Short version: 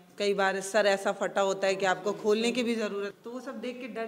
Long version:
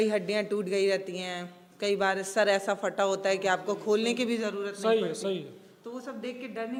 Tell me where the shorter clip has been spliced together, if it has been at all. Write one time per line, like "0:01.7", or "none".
0:03.1